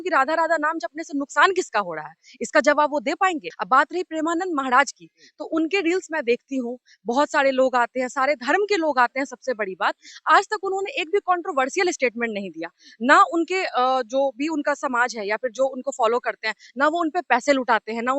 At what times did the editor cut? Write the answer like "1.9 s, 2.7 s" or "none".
3.5 s